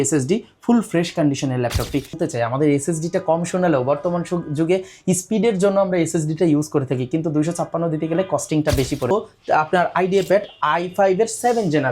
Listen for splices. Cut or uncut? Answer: cut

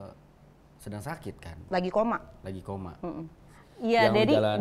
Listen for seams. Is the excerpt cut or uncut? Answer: cut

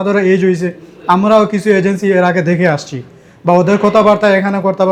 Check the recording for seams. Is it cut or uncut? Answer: uncut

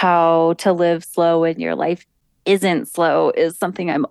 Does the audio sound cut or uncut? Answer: uncut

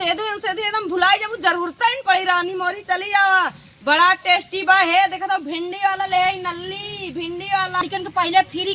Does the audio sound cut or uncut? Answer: cut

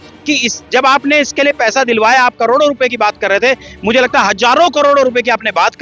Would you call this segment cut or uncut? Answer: uncut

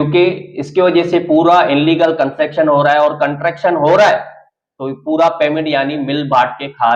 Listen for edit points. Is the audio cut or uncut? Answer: uncut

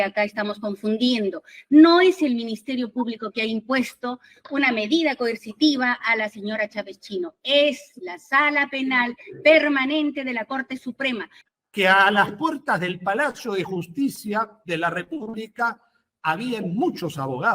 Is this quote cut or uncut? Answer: cut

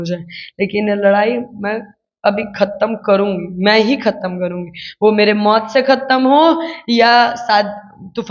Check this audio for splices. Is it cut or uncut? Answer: uncut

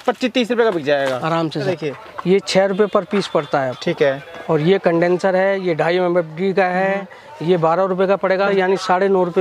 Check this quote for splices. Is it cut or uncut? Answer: cut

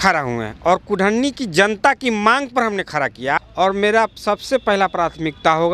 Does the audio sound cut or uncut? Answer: cut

